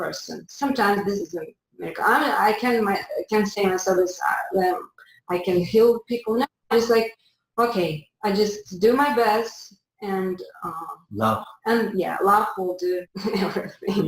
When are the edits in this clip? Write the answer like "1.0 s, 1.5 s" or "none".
13.1 s